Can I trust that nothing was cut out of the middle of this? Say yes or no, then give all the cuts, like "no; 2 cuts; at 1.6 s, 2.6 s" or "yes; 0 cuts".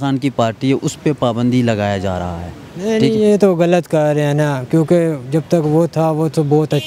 yes; 0 cuts